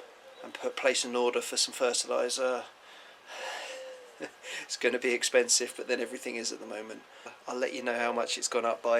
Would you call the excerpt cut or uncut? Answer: cut